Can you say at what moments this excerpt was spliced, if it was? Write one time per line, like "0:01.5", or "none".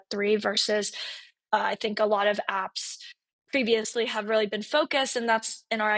none